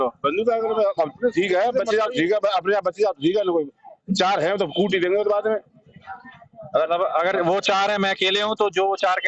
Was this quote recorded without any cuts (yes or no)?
yes